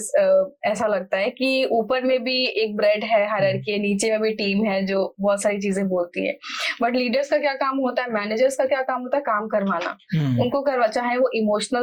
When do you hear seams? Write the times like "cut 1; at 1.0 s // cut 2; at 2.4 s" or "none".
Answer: none